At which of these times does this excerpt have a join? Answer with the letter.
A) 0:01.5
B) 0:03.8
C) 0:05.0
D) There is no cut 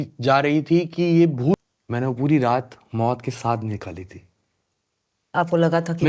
A